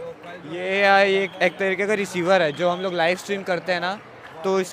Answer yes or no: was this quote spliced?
no